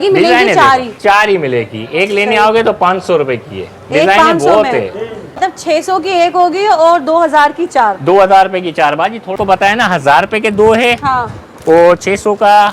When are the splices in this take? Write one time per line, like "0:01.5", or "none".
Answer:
0:05.4
0:09.3

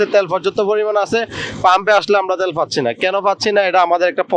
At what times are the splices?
none

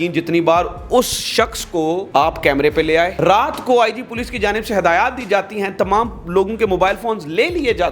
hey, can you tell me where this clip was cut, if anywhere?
0:02.1
0:03.1

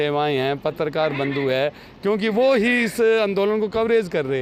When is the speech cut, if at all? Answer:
none

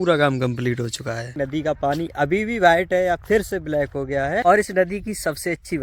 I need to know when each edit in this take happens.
0:01.3
0:04.4

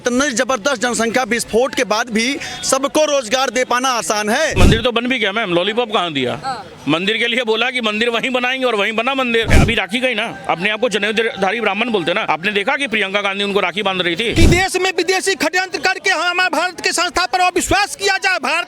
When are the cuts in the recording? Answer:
0:04.5
0:09.5
0:12.2
0:14.3

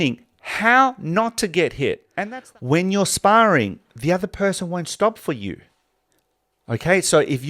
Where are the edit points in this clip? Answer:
0:02.1

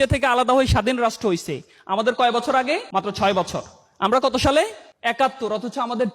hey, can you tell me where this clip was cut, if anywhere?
0:02.9
0:04.9

